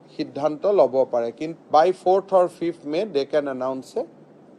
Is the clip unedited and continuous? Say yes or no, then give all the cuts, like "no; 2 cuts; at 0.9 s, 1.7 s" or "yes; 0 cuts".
no; 1 cut; at 1.5 s